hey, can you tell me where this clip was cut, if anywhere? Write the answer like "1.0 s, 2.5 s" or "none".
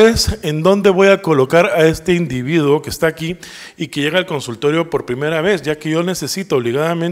none